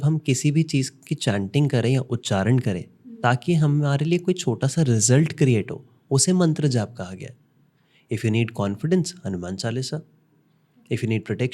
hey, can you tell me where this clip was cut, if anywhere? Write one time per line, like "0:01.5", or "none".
none

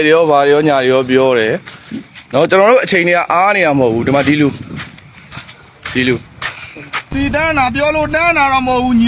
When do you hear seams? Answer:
0:07.0

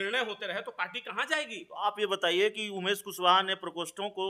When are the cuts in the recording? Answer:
none

